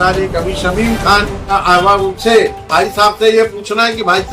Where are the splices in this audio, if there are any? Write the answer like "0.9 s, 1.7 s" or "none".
1.4 s